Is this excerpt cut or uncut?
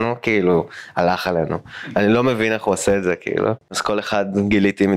cut